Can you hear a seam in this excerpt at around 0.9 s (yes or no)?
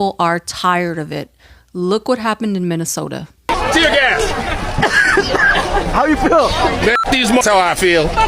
no